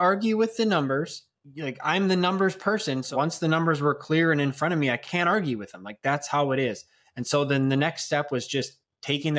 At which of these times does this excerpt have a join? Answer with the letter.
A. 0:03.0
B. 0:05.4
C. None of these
A